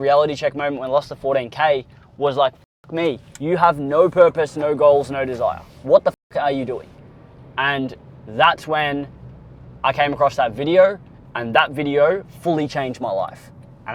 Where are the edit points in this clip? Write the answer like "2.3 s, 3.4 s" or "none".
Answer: none